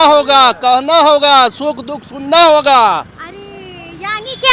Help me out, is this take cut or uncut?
uncut